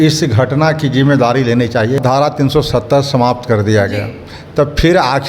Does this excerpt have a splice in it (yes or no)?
yes